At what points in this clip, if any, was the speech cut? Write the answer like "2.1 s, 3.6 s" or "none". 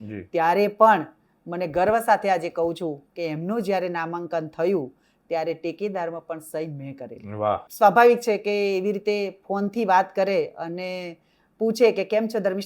7.7 s